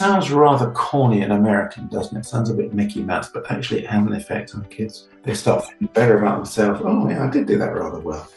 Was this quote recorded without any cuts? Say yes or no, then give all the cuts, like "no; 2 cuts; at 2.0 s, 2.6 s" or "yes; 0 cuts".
no; 1 cut; at 5.0 s